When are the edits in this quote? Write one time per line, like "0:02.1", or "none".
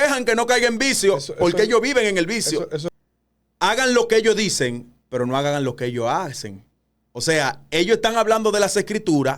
0:02.9